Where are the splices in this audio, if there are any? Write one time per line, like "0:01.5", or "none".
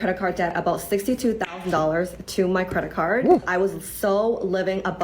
0:03.3